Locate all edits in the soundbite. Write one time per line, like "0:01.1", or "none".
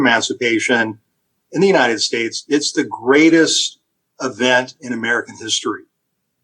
none